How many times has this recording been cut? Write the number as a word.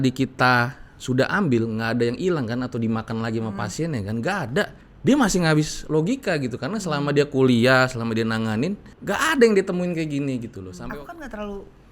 three